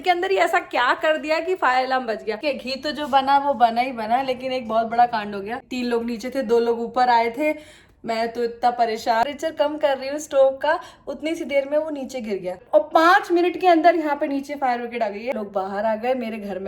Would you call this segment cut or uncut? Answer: cut